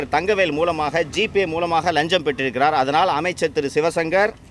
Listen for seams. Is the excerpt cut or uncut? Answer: uncut